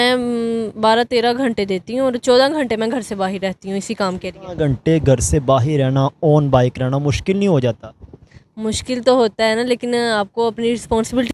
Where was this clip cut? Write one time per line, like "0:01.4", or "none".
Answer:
none